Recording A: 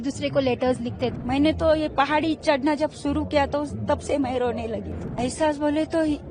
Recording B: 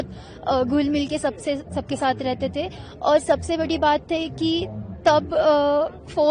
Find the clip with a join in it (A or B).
A